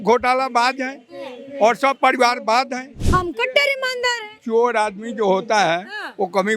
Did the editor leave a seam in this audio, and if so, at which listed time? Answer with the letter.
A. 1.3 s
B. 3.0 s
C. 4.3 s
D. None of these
B